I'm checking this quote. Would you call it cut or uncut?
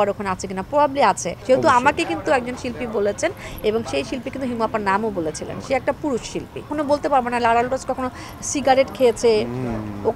cut